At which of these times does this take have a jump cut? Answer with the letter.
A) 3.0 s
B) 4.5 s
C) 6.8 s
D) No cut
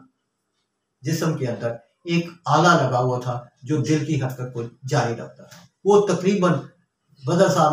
D